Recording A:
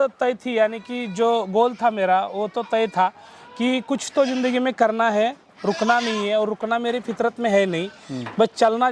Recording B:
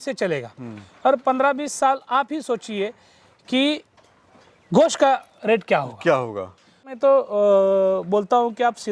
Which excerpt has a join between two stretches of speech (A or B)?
B